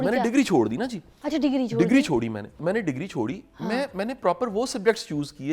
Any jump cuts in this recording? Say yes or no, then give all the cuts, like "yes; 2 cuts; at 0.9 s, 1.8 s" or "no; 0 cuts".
yes; 1 cut; at 2.6 s